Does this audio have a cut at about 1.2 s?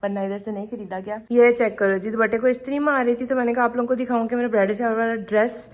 yes; 1 cut; at 1.2 s

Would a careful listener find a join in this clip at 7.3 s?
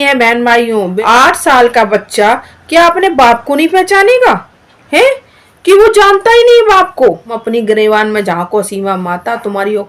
yes; 2 cuts; at 0.9 s, 7.3 s

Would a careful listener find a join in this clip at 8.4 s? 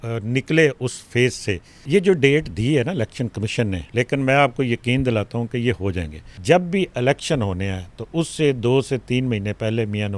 no; 3 cuts; at 1.7 s, 3.8 s, 6.3 s

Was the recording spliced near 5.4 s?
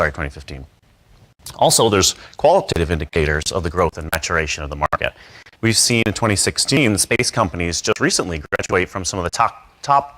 no; 0 cuts

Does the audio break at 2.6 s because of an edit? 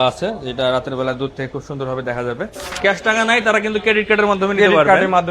yes; 1 cut; at 2.6 s

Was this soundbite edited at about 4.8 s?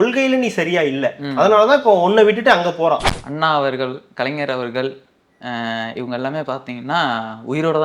no; 1 cut; at 3.1 s

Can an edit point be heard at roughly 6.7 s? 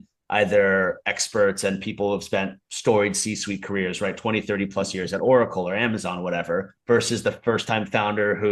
yes; 1 cut; at 6.7 s

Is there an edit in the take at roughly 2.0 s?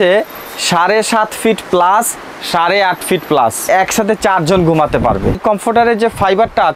no; 2 cuts; at 3.7 s, 5.4 s

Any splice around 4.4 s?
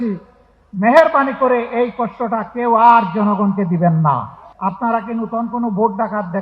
yes; 1 cut; at 4.4 s

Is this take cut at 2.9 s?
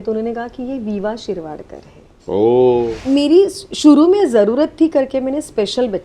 yes; 1 cut; at 2.9 s

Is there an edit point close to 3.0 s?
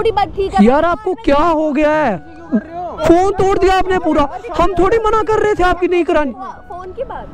yes; 1 cut; at 3.0 s

